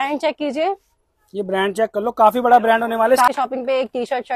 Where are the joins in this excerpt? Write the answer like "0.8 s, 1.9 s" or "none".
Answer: 3.3 s